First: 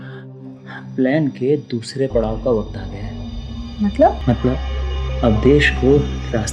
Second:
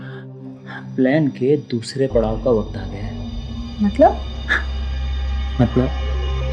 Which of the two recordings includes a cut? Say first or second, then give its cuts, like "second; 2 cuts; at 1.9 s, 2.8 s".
first; 1 cut; at 4.2 s